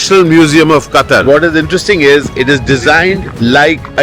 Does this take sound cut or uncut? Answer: cut